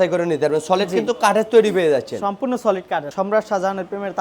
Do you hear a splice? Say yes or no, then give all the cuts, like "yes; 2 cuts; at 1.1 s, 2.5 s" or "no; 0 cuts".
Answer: yes; 1 cut; at 3.1 s